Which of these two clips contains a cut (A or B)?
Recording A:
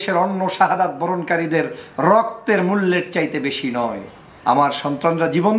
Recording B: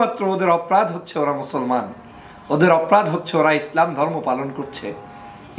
A